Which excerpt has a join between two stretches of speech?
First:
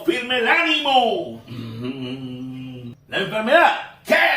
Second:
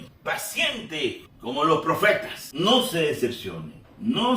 second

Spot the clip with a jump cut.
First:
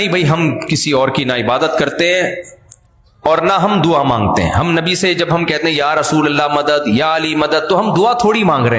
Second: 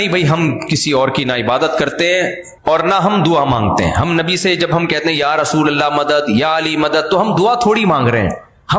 second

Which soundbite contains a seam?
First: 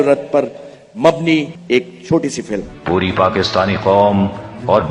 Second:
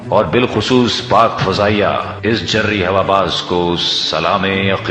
first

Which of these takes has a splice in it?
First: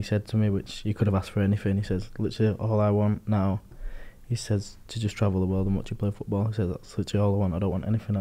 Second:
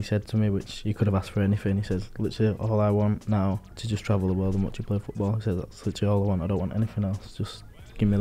second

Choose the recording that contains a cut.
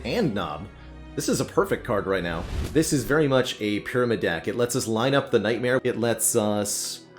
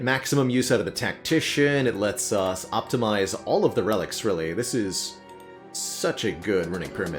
first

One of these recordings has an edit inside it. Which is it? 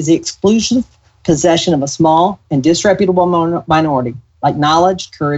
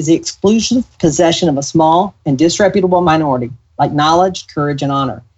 second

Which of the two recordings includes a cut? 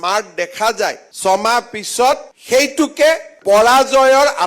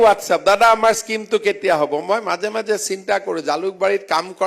first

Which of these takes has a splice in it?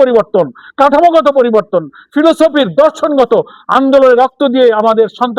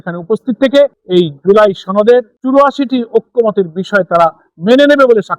second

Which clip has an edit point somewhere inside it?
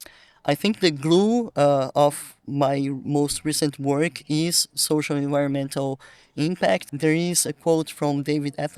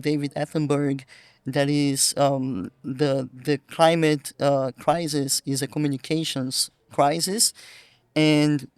first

